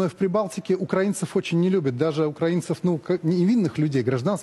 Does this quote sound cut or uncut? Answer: uncut